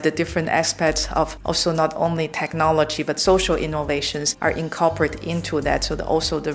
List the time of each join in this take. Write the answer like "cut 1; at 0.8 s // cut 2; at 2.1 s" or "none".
cut 1; at 1.4 s // cut 2; at 4.2 s